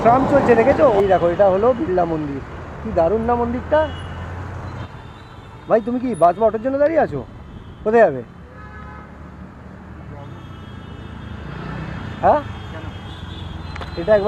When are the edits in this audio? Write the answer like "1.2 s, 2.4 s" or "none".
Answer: 1.0 s, 4.9 s